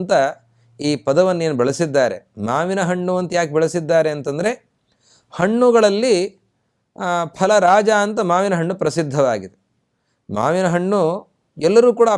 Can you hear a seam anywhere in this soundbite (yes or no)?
no